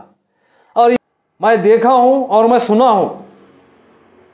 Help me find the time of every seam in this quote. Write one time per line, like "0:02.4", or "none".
0:01.0